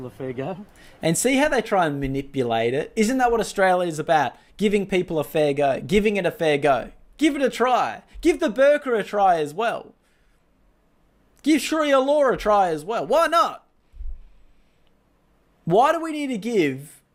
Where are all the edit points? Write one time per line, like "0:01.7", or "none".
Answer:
none